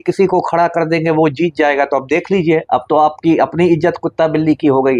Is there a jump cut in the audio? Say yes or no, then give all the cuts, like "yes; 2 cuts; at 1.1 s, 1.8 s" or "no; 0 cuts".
no; 0 cuts